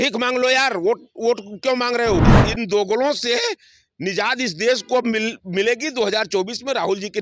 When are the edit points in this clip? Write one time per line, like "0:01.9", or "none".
0:02.2